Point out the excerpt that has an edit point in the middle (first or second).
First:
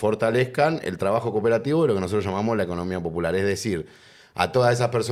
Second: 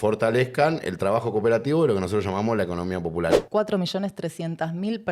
second